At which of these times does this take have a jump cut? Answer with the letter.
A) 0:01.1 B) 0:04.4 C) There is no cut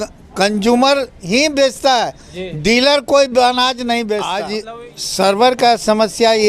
B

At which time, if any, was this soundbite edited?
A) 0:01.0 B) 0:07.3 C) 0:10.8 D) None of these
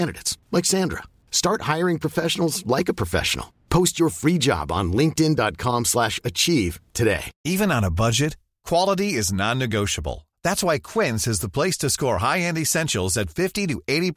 D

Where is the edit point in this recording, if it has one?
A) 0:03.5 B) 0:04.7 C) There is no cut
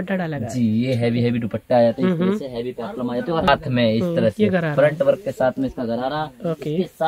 A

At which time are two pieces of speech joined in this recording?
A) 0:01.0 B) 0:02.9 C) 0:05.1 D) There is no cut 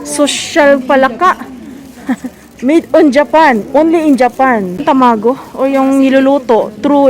C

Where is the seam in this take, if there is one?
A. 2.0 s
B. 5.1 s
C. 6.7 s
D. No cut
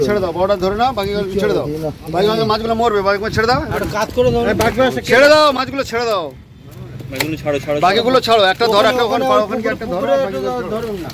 D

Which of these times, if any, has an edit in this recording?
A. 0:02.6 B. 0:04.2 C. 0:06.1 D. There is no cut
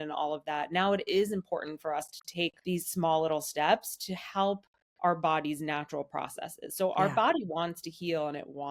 A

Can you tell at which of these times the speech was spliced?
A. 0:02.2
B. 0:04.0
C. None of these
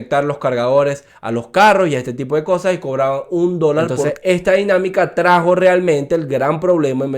B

